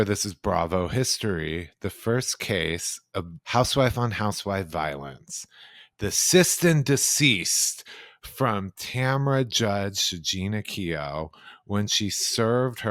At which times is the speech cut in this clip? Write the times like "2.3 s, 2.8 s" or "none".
3.3 s